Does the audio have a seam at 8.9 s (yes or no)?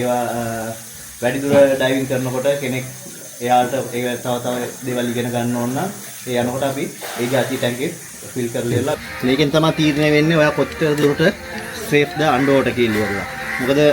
yes